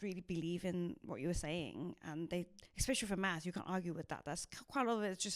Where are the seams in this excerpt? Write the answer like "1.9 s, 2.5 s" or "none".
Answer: 2.6 s